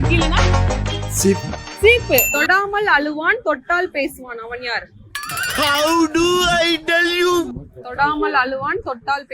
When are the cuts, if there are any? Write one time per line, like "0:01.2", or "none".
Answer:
0:02.3